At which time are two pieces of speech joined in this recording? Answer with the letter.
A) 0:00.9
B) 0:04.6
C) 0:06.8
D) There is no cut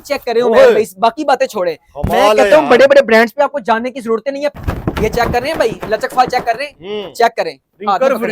B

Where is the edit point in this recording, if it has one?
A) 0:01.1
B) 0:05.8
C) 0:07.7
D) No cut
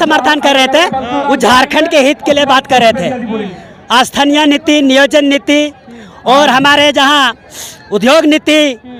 D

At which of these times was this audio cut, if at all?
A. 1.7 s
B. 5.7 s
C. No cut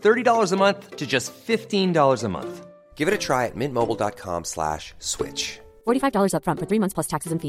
C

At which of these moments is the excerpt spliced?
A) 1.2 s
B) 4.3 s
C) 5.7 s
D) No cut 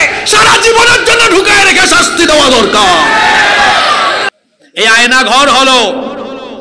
B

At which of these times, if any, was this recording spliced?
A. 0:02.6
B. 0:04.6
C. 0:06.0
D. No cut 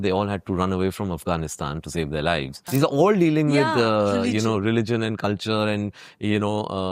A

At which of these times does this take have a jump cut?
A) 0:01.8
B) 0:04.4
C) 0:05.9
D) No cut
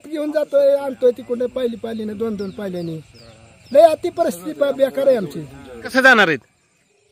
C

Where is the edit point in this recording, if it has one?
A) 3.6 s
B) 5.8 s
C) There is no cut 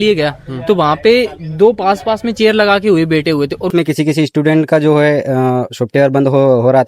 A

